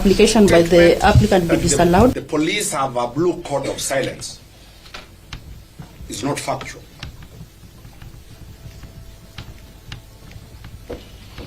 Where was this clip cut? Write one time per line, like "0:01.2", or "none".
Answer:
0:02.2